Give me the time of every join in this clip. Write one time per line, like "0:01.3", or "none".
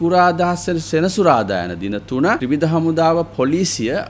0:02.4